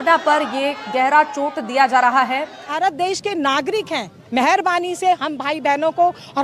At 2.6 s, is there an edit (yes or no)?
yes